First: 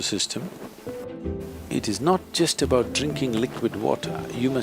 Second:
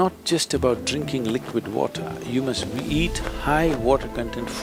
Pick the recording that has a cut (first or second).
first